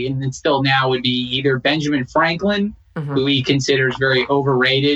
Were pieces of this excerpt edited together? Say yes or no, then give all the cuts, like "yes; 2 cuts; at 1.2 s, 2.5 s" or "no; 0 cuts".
no; 0 cuts